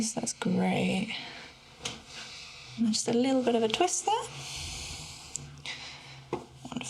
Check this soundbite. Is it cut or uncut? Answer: cut